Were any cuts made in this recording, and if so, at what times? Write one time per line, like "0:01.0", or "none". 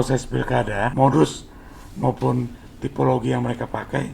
0:00.9